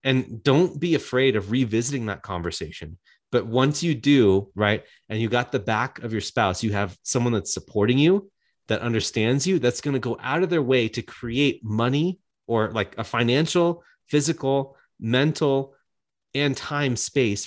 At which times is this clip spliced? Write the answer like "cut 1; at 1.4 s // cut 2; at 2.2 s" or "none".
none